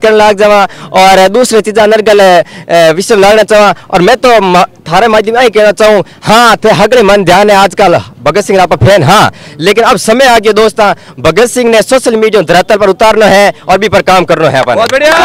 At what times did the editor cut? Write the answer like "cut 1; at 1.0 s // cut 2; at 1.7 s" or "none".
none